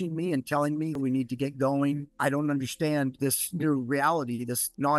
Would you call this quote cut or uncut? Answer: cut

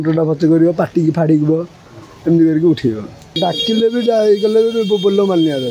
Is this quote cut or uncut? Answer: cut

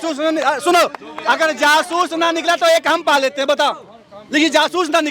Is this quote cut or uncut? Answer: uncut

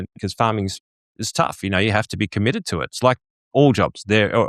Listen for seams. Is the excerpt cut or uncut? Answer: uncut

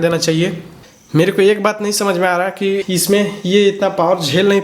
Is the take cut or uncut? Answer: cut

